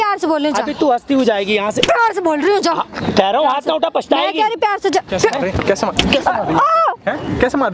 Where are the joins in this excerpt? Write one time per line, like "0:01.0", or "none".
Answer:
none